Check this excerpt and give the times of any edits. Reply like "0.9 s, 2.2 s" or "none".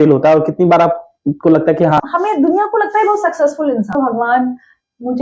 2.0 s, 3.9 s